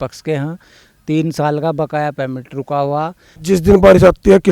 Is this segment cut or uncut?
cut